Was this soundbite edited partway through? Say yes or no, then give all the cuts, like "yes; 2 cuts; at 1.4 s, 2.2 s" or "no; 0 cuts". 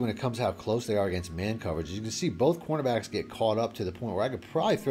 no; 0 cuts